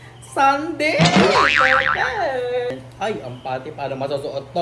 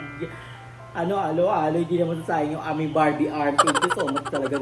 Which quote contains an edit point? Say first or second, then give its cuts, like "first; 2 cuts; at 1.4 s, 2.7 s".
first; 1 cut; at 2.7 s